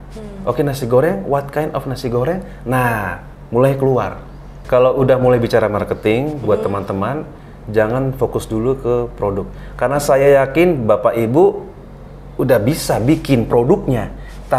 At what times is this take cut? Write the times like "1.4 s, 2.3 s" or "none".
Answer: 4.6 s